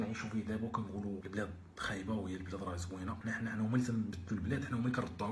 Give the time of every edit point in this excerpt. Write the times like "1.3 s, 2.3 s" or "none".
1.2 s, 3.2 s